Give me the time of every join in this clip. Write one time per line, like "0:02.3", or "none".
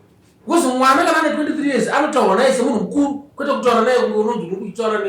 none